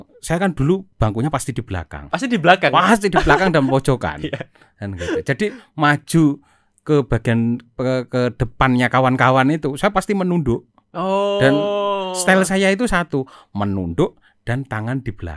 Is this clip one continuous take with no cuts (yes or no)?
yes